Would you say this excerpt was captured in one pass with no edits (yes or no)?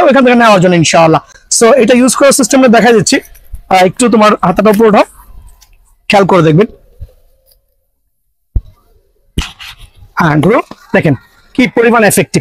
yes